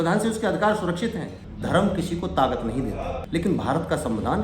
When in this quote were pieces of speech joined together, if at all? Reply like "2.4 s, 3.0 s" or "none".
1.4 s, 3.2 s